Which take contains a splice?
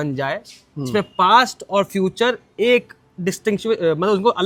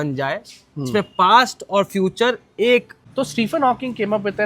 second; 1 cut; at 3.0 s

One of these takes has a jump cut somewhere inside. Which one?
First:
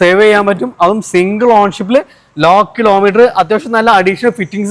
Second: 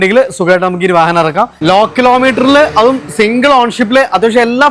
second; 1 cut; at 1.5 s

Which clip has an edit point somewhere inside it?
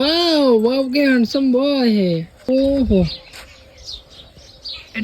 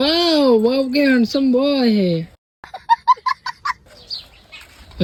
first; 1 cut; at 2.3 s

